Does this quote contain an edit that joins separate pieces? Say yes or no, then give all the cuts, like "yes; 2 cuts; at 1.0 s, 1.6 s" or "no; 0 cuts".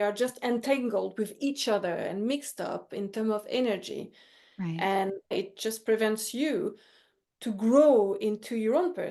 yes; 1 cut; at 5.3 s